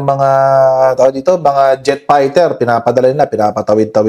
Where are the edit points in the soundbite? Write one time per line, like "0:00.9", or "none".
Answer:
none